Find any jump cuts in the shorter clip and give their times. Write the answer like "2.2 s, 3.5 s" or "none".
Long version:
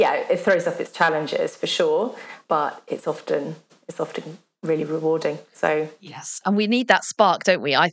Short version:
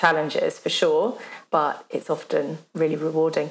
2.6 s